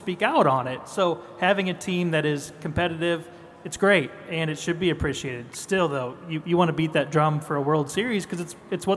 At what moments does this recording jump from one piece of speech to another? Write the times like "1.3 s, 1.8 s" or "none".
none